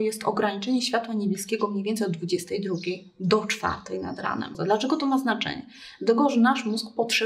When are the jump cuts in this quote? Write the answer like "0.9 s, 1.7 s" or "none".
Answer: 4.6 s